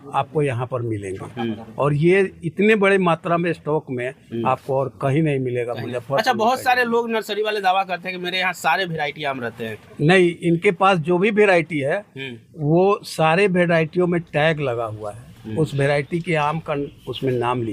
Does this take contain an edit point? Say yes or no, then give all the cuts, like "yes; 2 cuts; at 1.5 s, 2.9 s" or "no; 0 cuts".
no; 0 cuts